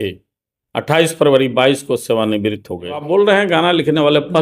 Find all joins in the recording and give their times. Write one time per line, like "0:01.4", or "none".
0:03.1